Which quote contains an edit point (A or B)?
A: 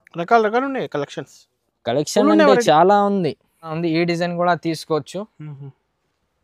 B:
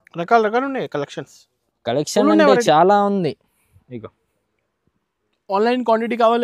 A